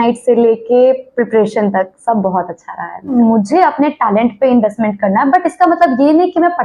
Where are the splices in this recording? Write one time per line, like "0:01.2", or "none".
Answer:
0:03.1